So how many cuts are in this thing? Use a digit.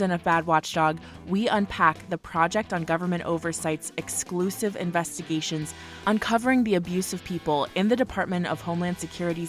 0